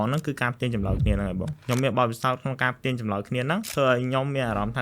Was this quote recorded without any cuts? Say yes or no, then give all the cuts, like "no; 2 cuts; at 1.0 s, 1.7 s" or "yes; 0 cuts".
no; 2 cuts; at 1.6 s, 3.7 s